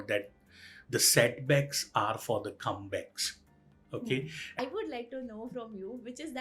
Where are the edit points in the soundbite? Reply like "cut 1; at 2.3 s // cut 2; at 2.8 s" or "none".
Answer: cut 1; at 4.6 s